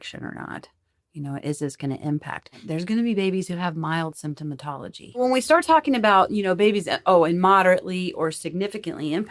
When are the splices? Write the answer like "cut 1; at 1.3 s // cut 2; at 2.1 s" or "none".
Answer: cut 1; at 2.5 s // cut 2; at 5.2 s

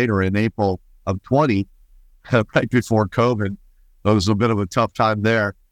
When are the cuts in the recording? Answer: none

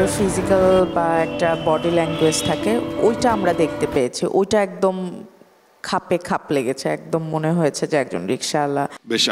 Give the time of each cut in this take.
none

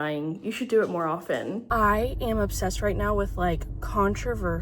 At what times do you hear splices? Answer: cut 1; at 1.6 s

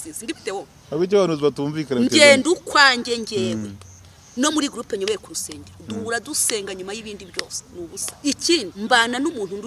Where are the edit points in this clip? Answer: cut 1; at 8.1 s // cut 2; at 8.7 s

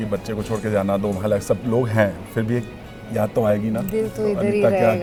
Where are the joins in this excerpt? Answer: none

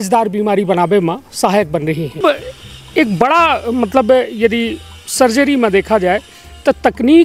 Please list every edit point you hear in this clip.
cut 1; at 2.2 s

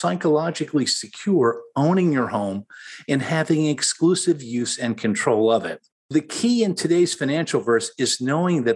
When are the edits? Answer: none

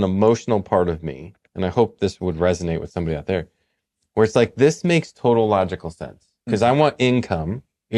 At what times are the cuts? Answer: none

